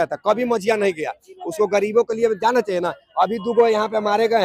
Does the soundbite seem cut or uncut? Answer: uncut